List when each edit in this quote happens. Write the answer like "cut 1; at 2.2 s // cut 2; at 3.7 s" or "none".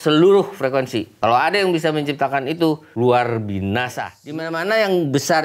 cut 1; at 1.1 s // cut 2; at 2.9 s // cut 3; at 4.2 s